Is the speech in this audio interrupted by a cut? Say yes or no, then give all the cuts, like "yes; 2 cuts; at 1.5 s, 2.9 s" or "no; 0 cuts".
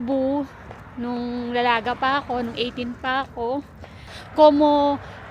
yes; 1 cut; at 4.1 s